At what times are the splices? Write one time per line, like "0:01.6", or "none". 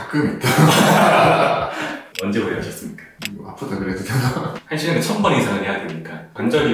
0:02.0
0:04.6